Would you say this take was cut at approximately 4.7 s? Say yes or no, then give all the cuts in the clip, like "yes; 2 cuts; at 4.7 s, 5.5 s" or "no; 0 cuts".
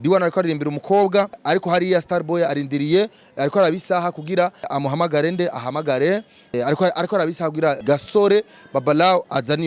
yes; 4 cuts; at 1.4 s, 4.7 s, 6.5 s, 7.8 s